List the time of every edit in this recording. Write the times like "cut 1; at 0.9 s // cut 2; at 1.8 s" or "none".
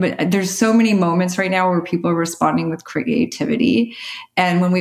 none